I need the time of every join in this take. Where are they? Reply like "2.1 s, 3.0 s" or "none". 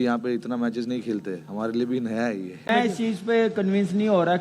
2.7 s